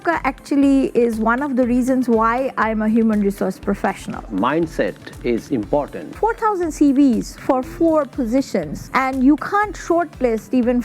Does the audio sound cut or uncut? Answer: cut